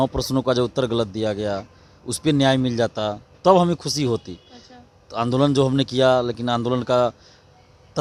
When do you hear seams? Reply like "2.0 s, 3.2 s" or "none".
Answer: none